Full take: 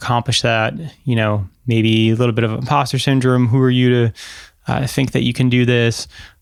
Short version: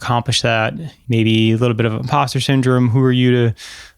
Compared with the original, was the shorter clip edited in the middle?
yes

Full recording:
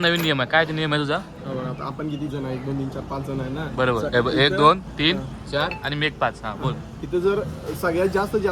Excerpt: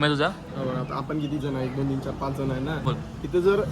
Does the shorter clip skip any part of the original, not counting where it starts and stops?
yes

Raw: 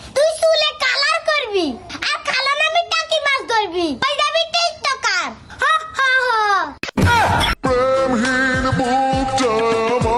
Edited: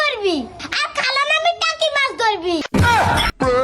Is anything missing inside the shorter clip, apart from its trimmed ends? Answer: yes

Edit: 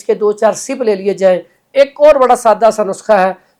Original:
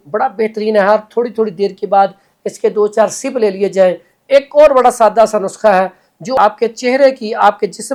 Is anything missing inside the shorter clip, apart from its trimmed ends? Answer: no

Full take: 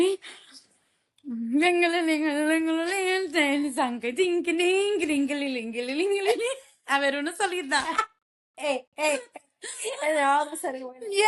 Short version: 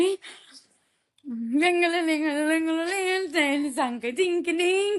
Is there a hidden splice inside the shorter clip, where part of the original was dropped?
no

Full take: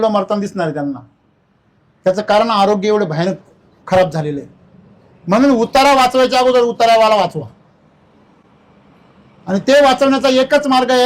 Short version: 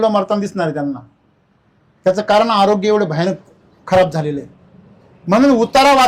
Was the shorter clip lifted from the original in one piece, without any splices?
yes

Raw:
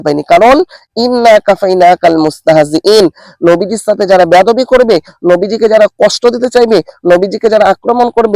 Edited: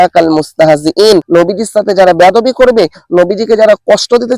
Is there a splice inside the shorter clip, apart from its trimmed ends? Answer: yes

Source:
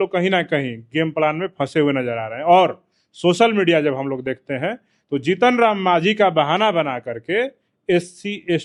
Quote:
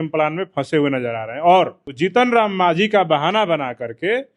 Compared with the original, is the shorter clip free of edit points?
no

